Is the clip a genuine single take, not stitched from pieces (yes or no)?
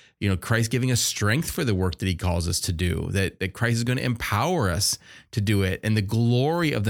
yes